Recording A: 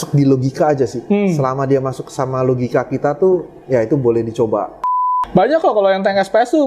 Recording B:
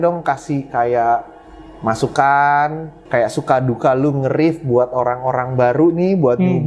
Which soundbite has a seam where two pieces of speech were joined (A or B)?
A